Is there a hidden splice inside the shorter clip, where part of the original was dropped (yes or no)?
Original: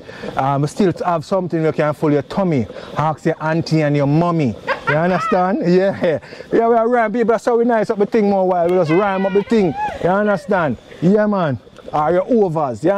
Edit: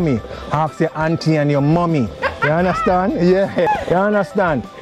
yes